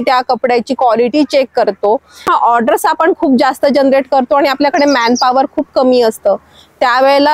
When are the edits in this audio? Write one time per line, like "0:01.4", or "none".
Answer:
0:02.3